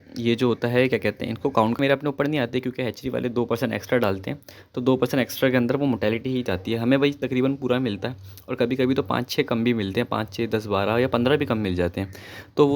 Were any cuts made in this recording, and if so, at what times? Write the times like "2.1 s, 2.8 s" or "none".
1.8 s